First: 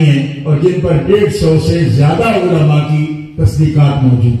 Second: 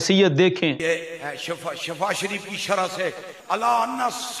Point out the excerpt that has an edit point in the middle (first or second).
second